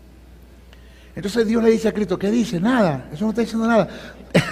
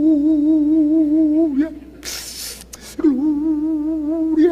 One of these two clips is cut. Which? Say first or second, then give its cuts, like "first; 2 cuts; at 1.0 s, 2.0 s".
first; 1 cut; at 2.5 s